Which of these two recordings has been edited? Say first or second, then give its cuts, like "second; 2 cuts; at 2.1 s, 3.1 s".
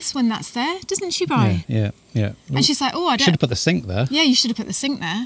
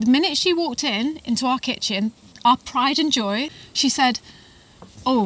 second; 1 cut; at 3.5 s